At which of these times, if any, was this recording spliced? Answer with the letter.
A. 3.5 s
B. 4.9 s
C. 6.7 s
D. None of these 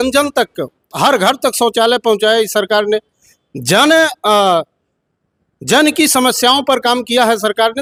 D